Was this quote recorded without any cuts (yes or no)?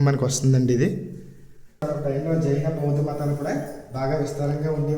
no